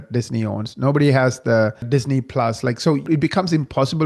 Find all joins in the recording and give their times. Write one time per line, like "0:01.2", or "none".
0:01.8
0:03.1